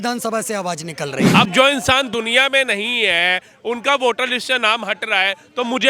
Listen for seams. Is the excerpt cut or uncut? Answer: cut